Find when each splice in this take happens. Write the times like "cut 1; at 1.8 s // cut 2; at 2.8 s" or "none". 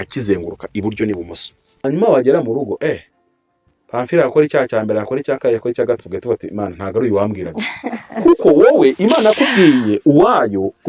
cut 1; at 1.6 s